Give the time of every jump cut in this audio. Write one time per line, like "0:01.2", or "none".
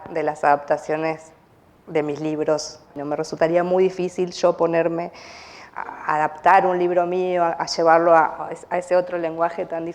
0:03.0